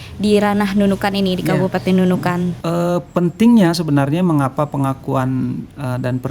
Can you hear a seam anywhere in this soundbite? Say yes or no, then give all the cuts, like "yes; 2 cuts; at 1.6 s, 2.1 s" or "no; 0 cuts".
yes; 1 cut; at 2.6 s